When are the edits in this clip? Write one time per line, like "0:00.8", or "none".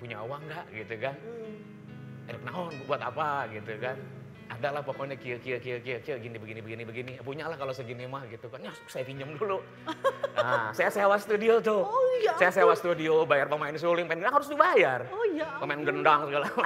none

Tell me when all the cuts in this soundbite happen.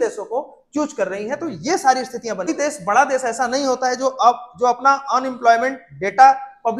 0:02.5

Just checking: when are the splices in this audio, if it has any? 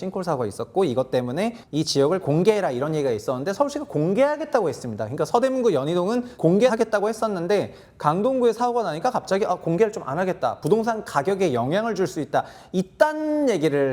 0:01.6
0:06.5

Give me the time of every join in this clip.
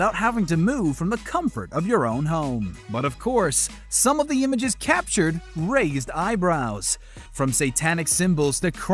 0:06.1

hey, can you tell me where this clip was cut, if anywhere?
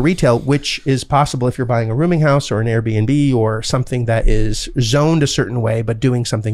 none

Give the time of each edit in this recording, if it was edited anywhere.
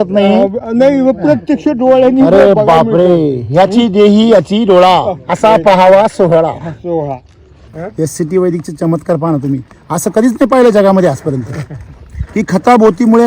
0:05.2
0:07.8

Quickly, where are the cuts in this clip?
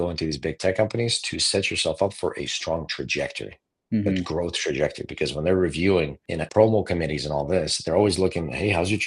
0:06.4

